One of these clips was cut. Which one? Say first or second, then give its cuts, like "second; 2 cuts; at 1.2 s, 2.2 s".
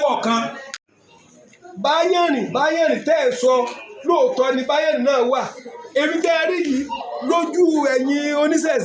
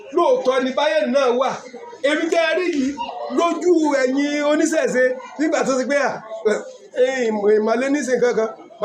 first; 1 cut; at 1.0 s